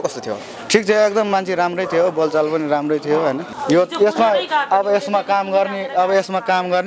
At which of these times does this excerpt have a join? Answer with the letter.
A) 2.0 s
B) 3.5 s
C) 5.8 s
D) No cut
B